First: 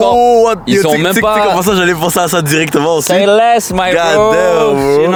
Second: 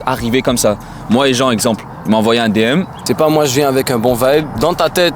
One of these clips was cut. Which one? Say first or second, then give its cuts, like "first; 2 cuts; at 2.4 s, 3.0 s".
second; 1 cut; at 3.0 s